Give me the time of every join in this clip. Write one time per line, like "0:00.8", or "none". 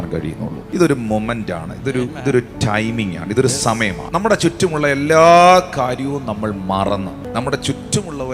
0:04.0
0:07.3